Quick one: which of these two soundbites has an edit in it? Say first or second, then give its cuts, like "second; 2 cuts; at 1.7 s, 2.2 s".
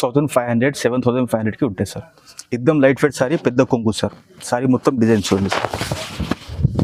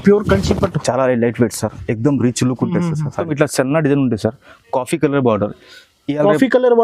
second; 1 cut; at 3.3 s